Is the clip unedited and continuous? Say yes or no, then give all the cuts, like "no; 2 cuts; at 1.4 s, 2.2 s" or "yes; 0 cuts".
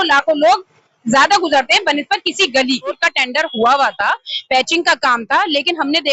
no; 1 cut; at 3.0 s